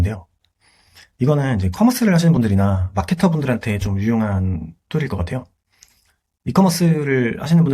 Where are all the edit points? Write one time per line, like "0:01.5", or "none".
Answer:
none